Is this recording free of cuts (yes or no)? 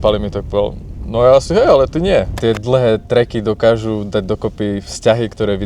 no